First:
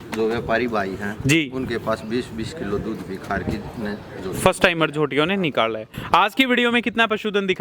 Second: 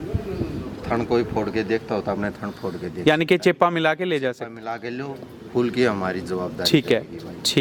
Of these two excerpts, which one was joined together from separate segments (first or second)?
first